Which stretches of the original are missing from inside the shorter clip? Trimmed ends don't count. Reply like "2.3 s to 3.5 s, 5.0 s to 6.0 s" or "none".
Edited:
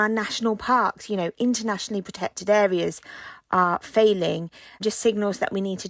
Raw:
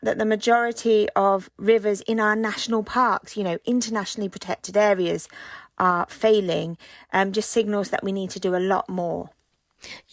7.1 s to 7.3 s